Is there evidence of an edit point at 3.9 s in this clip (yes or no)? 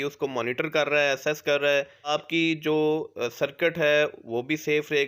no